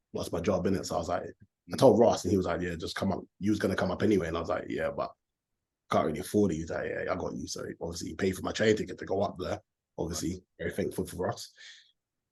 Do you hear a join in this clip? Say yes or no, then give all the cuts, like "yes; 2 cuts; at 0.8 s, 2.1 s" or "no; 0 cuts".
no; 0 cuts